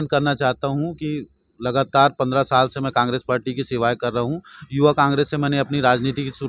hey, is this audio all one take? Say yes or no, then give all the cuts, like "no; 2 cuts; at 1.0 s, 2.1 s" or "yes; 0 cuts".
yes; 0 cuts